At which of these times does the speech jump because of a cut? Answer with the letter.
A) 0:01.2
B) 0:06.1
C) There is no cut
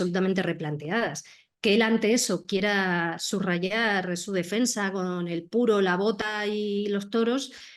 C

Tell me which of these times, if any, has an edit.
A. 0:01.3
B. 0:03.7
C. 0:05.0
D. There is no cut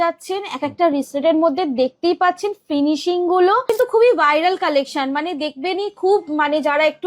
B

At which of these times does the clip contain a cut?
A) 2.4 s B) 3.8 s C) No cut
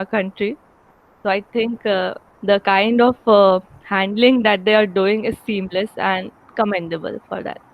C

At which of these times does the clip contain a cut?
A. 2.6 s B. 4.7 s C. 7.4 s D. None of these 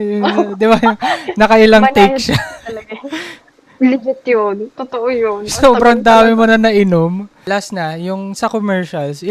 C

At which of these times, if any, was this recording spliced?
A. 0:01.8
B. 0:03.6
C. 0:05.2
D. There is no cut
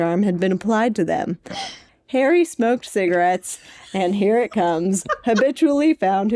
A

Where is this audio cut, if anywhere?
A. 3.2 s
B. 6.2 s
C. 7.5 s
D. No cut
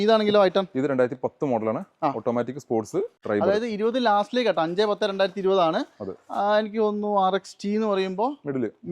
A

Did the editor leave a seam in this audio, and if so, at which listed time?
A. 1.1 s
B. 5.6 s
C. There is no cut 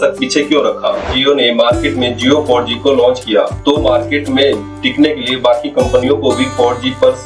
A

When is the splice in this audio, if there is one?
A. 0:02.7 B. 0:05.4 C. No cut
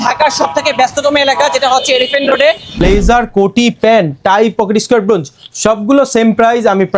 A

